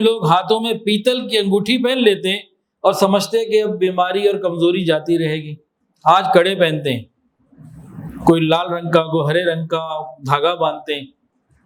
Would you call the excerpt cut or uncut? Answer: uncut